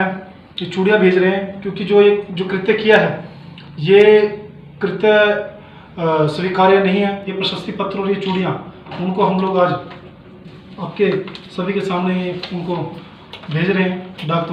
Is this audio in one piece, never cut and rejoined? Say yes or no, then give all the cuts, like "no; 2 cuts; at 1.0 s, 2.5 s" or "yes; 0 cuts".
no; 1 cut; at 7.3 s